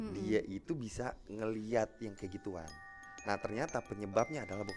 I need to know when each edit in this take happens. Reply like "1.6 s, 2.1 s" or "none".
none